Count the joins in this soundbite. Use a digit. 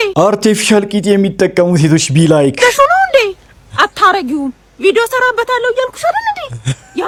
0